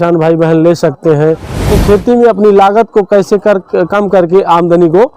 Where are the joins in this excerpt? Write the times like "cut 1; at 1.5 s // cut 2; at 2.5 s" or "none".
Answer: cut 1; at 1.6 s